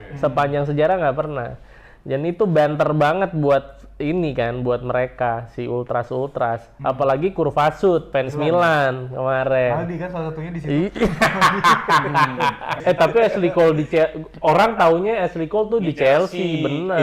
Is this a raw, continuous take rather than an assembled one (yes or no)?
no